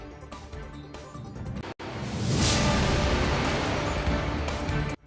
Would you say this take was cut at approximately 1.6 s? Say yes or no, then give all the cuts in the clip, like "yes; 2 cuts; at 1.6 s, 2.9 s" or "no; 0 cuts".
yes; 1 cut; at 1.6 s